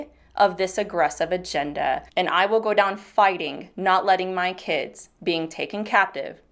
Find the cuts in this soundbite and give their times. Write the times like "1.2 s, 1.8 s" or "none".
none